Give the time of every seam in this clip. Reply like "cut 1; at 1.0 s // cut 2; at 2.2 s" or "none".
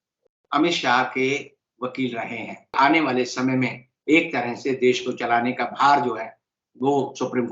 cut 1; at 2.7 s

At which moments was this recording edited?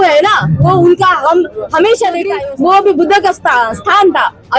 cut 1; at 2.3 s

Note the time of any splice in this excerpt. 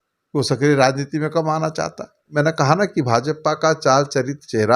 cut 1; at 2.3 s

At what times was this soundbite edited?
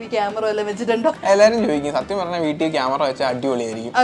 cut 1; at 1.2 s

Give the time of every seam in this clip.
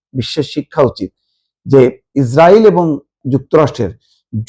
cut 1; at 2.0 s // cut 2; at 3.2 s

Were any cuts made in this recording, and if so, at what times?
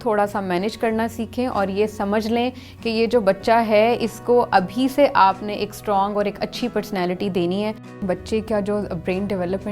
cut 1; at 8.0 s

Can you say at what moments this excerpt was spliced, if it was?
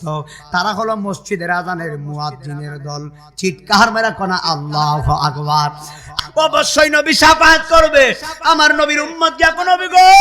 cut 1; at 6.1 s

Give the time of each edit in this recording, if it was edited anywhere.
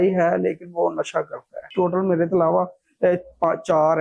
cut 1; at 1.6 s

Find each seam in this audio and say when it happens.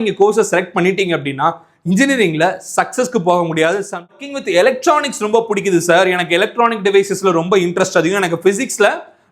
cut 1; at 4.2 s

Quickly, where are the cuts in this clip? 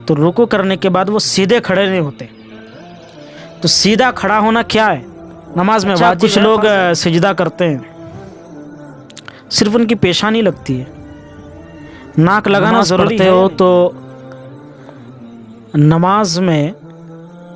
cut 1; at 6.2 s // cut 2; at 13.1 s

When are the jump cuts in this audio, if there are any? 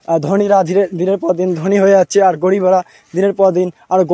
none

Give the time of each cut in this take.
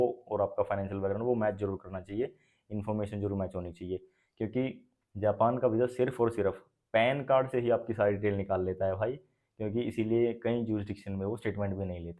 none

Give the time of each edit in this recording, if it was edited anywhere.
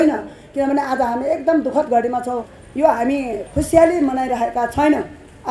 cut 1; at 2.5 s

